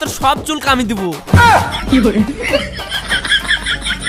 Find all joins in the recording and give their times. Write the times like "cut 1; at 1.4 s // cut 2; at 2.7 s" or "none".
none